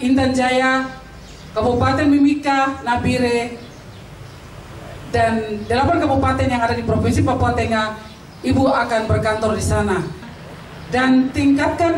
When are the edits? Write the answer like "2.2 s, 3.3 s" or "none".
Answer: 10.2 s